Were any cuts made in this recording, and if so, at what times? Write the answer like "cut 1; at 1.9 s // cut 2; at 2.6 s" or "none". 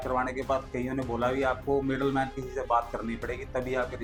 none

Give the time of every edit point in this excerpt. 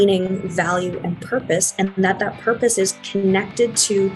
none

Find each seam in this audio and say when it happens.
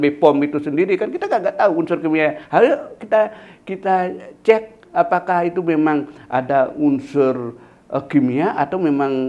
none

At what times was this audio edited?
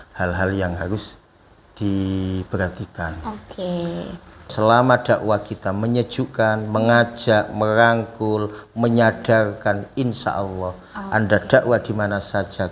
cut 1; at 4.5 s

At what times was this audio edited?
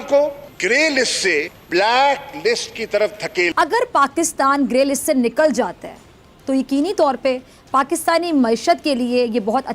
cut 1; at 3.5 s

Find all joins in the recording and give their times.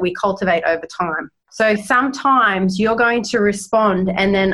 cut 1; at 1.4 s

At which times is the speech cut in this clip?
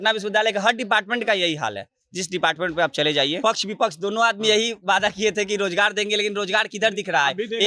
cut 1; at 3.4 s

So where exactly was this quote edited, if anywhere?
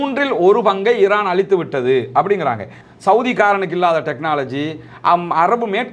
cut 1; at 2.8 s

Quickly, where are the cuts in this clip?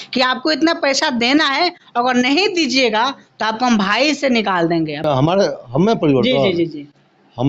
cut 1; at 5.1 s

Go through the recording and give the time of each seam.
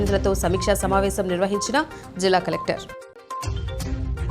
cut 1; at 3.2 s

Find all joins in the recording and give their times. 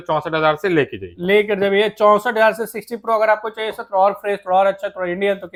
none

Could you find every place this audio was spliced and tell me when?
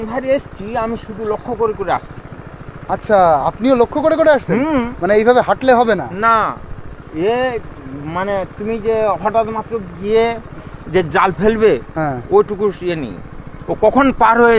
none

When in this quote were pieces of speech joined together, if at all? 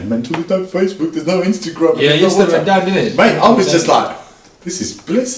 none

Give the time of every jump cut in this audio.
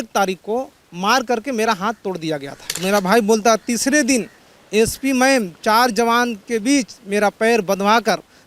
cut 1; at 2.7 s

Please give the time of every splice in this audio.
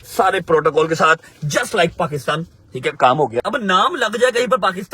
cut 1; at 3.4 s

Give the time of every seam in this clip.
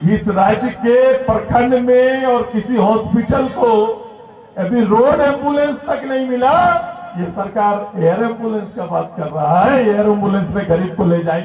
none

